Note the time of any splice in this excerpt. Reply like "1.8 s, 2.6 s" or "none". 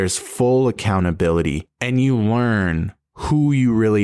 1.7 s